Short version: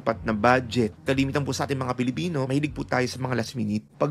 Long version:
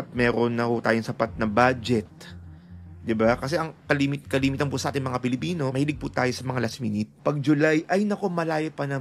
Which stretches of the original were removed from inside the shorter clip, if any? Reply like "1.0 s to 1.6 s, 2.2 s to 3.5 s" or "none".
2.1 s to 4.2 s